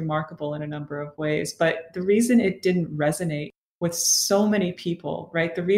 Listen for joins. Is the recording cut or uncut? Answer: uncut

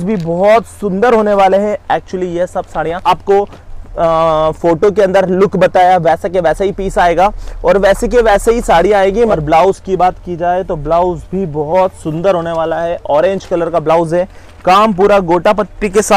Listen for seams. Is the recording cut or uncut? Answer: cut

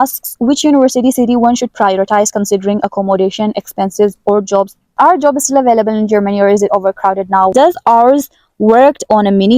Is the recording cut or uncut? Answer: cut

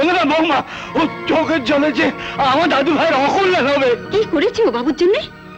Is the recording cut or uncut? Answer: uncut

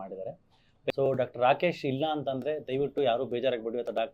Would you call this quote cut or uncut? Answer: cut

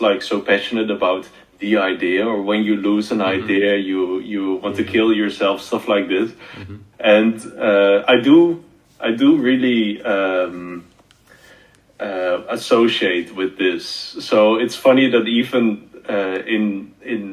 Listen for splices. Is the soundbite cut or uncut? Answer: uncut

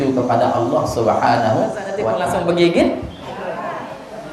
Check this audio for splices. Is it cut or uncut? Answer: cut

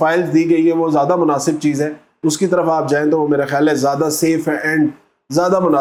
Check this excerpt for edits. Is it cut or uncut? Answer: uncut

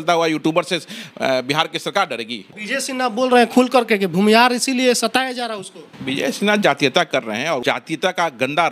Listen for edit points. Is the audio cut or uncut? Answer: cut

